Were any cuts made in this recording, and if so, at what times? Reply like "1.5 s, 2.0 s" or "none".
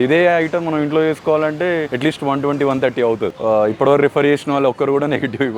3.3 s